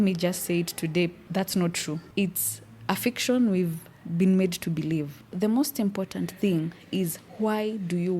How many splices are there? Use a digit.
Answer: 3